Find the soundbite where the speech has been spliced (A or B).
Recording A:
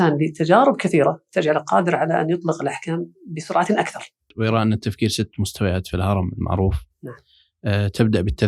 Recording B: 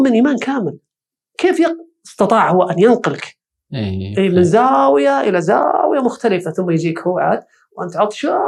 A